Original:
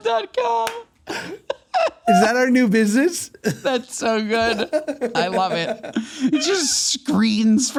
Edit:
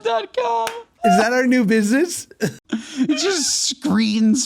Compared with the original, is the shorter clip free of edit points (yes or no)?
no